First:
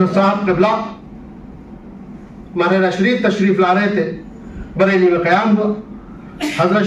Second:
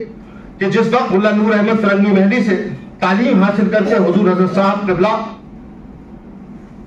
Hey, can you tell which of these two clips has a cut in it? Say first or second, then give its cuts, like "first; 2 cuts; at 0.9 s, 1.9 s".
second; 1 cut; at 1.1 s